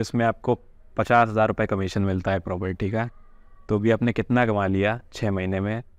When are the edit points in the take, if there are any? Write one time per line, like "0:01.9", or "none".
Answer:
none